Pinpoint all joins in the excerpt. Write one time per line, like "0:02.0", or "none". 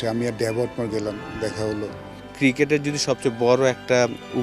0:02.0